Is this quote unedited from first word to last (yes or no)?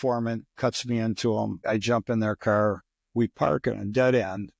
no